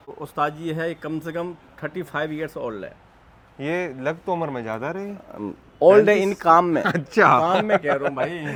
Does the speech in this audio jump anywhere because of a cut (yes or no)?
no